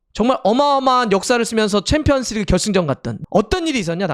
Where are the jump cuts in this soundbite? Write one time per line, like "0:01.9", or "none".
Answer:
0:03.1